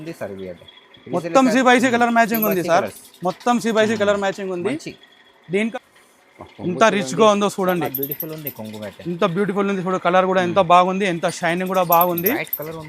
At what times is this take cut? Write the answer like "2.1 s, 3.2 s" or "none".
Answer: 5.7 s